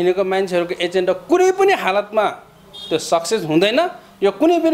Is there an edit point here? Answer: no; 0 cuts

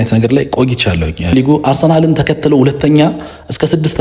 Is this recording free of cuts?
no; 1 cut; at 1.3 s

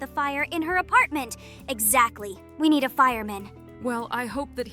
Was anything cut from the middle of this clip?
yes; 1 cut; at 3.7 s

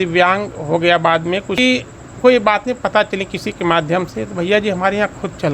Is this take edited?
yes; 1 cut; at 1.6 s

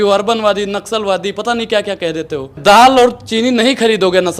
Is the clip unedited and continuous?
no; 1 cut; at 2.6 s

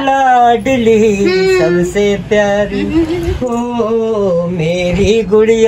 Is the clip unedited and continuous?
yes; 0 cuts

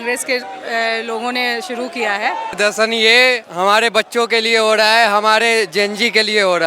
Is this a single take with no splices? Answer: no; 1 cut; at 2.5 s

